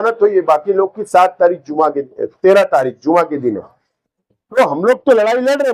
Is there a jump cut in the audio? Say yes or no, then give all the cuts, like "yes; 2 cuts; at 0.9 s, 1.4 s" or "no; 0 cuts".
no; 0 cuts